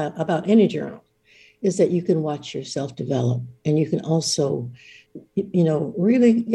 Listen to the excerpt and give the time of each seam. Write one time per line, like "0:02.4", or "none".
0:05.0